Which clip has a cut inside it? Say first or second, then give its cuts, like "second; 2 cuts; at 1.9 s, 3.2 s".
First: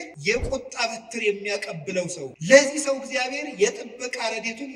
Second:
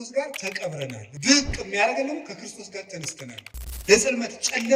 second; 2 cuts; at 1.1 s, 3.4 s